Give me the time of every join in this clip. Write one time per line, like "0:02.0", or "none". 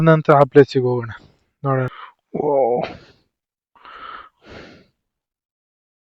0:01.9